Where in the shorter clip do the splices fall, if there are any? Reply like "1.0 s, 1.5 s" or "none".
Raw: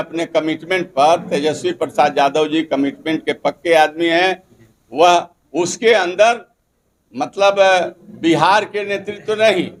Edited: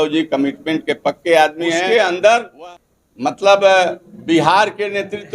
1.8 s